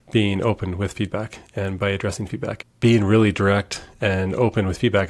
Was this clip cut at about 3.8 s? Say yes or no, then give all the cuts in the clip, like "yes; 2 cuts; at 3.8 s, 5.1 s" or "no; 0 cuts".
no; 1 cut; at 2.6 s